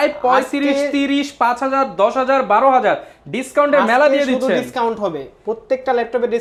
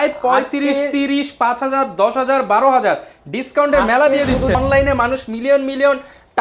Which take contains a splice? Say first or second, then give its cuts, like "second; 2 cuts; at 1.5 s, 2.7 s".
second; 1 cut; at 4.6 s